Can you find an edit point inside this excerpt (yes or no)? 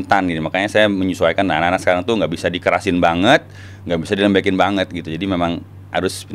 no